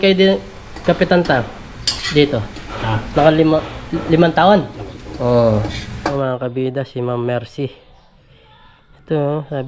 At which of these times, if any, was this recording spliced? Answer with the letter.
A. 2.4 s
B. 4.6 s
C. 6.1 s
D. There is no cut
C